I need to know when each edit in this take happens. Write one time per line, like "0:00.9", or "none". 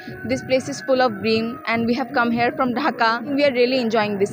0:03.3